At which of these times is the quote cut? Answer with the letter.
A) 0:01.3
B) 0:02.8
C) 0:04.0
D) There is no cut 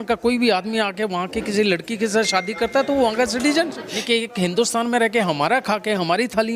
C